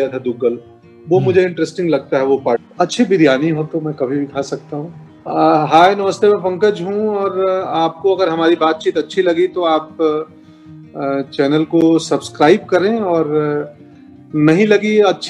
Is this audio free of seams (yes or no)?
no